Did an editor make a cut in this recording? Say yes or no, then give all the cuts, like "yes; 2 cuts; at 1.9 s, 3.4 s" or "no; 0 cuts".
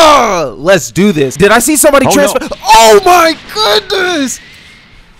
yes; 1 cut; at 1.3 s